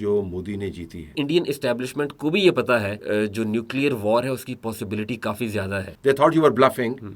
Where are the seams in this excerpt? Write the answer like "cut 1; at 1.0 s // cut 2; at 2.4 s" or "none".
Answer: cut 1; at 1.1 s // cut 2; at 3.0 s // cut 3; at 5.9 s